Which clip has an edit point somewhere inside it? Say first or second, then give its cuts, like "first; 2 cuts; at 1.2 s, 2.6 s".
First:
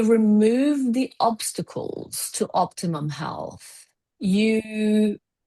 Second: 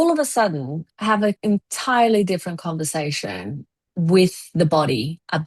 second; 1 cut; at 1.4 s